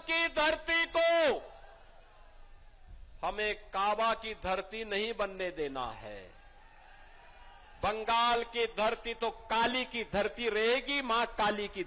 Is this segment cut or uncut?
uncut